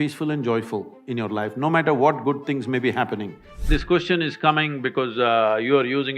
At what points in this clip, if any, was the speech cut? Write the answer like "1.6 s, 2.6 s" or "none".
3.7 s

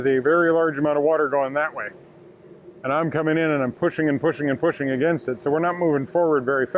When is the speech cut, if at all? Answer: none

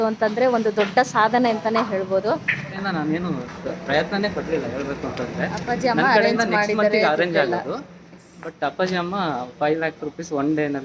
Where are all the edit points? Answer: 2.8 s

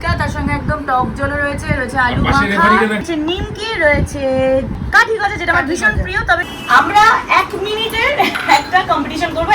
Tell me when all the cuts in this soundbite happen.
3.0 s, 4.8 s, 6.5 s

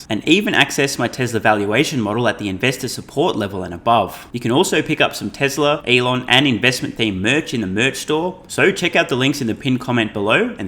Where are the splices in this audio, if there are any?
4.3 s, 5.8 s, 8.4 s

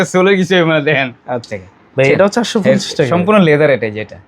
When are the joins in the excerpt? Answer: 1.5 s

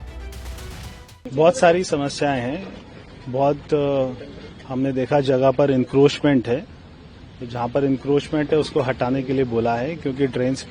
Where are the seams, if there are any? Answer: 1.3 s

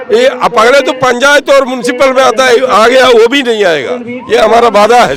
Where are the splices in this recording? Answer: none

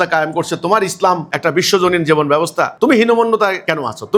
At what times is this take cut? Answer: none

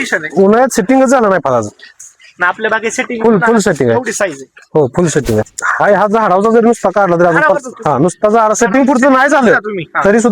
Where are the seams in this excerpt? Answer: 5.5 s

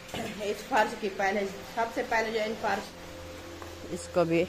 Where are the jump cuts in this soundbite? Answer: 2.9 s

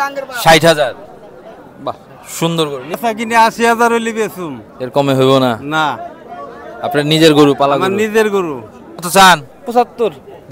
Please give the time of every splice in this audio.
3.0 s, 9.1 s

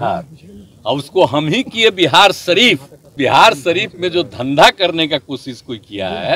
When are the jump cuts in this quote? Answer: 3.1 s

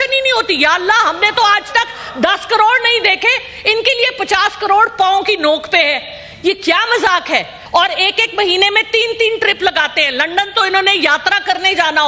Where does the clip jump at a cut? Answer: 7.6 s

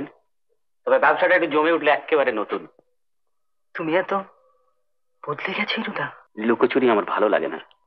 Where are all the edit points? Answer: 6.2 s

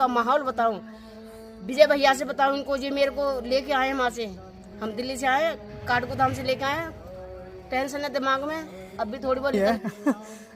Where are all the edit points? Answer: 9.5 s

